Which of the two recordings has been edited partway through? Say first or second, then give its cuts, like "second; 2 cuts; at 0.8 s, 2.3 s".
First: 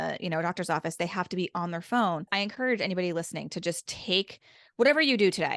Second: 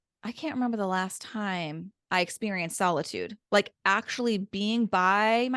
first; 1 cut; at 2.3 s